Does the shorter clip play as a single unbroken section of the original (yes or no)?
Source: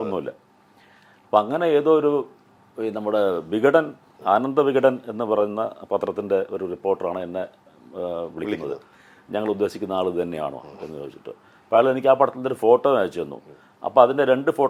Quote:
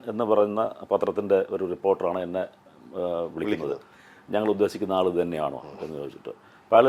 yes